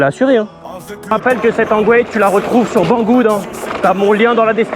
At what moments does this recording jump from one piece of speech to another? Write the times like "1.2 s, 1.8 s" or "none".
1.1 s